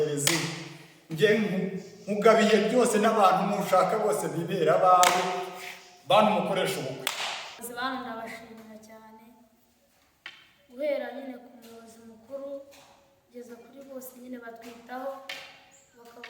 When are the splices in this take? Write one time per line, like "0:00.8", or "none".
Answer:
0:07.6